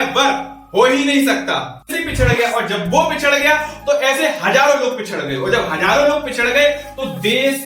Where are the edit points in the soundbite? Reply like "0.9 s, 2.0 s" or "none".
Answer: 1.9 s